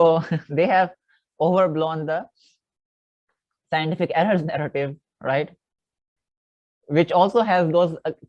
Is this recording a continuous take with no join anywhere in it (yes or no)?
yes